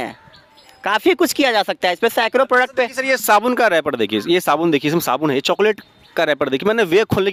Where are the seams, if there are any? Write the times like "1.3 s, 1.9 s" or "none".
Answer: none